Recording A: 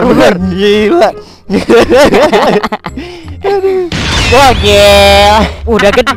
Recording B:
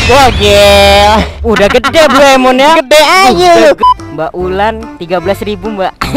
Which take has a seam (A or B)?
B